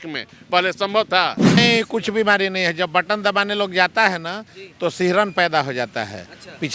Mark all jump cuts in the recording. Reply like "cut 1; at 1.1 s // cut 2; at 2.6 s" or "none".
cut 1; at 1.6 s